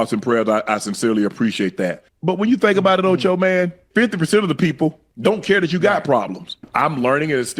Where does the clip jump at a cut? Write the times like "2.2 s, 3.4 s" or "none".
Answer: 2.1 s, 3.8 s, 5.1 s, 6.7 s